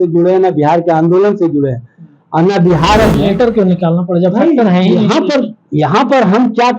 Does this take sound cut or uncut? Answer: cut